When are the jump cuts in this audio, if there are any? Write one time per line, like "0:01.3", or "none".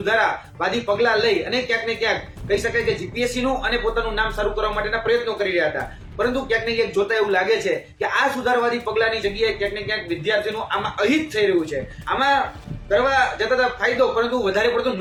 none